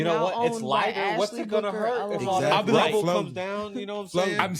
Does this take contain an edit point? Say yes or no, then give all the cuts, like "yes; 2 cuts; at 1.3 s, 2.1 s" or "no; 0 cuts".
no; 0 cuts